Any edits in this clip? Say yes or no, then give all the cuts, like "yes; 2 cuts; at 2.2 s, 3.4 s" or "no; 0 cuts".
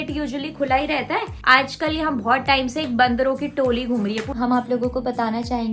yes; 2 cuts; at 1.3 s, 4.3 s